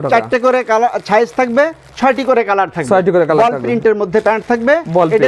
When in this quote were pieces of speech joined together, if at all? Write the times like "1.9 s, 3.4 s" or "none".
none